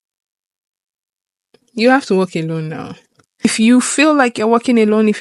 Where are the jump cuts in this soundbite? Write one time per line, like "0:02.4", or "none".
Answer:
0:03.4